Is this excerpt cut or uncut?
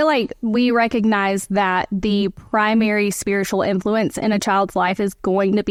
uncut